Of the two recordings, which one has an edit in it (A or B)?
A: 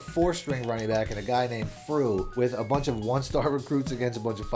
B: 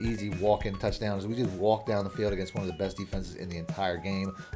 A